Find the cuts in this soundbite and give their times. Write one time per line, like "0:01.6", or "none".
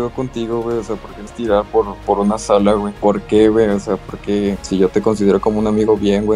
0:02.9
0:04.6